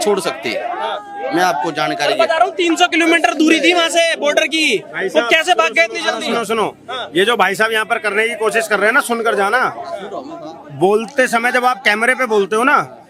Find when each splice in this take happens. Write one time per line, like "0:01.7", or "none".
none